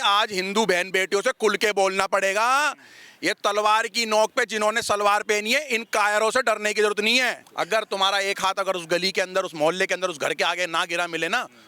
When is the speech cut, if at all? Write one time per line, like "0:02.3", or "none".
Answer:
0:07.4